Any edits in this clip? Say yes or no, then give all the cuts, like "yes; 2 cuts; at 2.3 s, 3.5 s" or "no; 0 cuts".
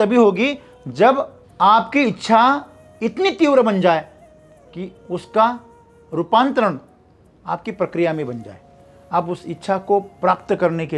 yes; 1 cut; at 1.4 s